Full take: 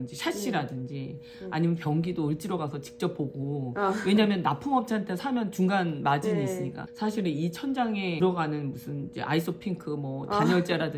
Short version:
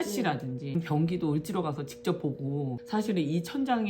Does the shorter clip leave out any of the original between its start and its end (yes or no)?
yes